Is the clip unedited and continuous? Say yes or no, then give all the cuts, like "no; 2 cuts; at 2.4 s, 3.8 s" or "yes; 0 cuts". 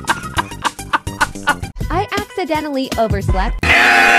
no; 1 cut; at 1.6 s